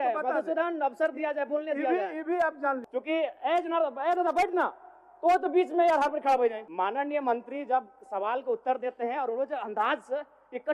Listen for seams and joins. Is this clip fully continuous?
no; 2 cuts; at 2.9 s, 6.6 s

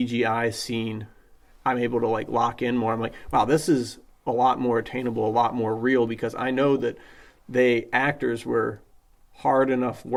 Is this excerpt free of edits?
yes; 0 cuts

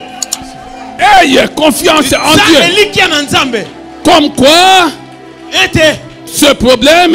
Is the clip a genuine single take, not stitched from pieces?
yes; 0 cuts

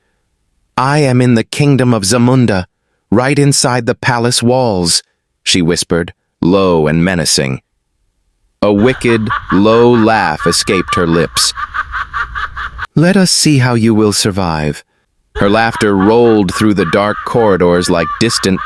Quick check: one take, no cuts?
yes; 0 cuts

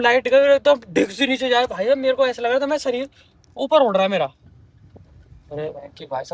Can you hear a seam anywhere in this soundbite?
no; 0 cuts

